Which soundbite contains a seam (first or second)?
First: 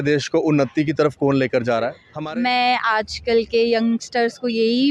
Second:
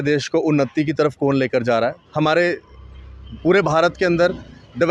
first